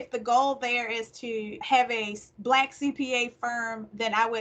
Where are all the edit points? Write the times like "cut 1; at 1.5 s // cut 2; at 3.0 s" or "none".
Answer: cut 1; at 1.6 s